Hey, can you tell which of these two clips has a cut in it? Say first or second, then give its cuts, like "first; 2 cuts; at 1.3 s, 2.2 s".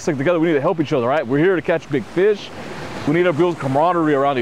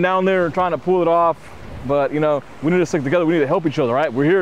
first; 1 cut; at 3.0 s